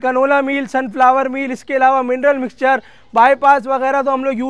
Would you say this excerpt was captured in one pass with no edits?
yes; 0 cuts

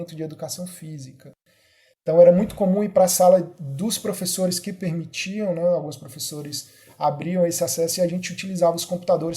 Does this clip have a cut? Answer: no; 0 cuts

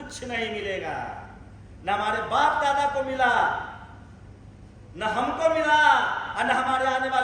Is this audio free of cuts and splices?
yes; 0 cuts

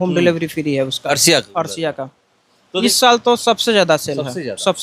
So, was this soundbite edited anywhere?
yes; 1 cut; at 2.8 s

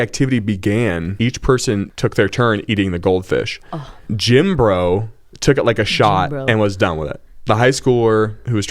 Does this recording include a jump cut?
yes; 3 cuts; at 1.1 s, 1.9 s, 4.0 s

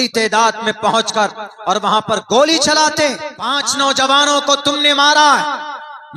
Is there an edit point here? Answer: yes; 1 cut; at 3.6 s

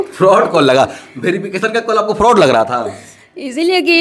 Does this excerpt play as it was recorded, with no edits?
yes; 0 cuts

